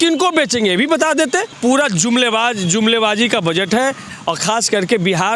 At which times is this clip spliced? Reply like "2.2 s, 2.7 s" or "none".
1.5 s, 4.1 s